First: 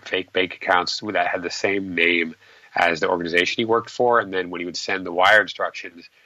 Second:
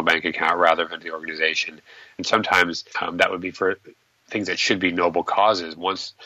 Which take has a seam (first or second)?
second